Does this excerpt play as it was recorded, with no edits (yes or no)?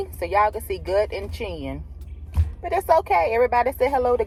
yes